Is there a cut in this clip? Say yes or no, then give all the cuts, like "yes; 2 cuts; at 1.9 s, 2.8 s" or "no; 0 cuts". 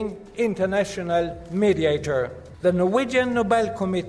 yes; 1 cut; at 2.4 s